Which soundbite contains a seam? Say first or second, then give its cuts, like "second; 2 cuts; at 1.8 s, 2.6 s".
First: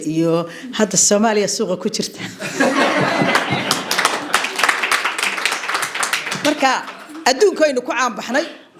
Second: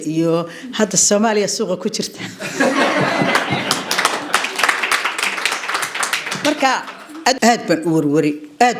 second; 1 cut; at 7.4 s